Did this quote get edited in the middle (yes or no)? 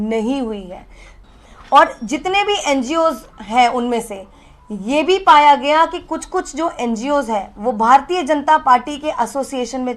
yes